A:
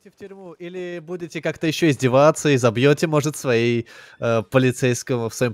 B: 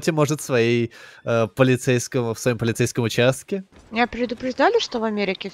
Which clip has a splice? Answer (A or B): B